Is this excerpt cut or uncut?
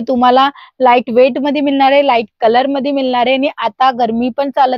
uncut